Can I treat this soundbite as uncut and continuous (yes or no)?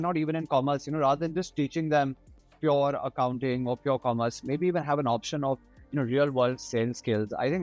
yes